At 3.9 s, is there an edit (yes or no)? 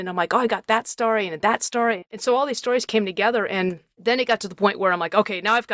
no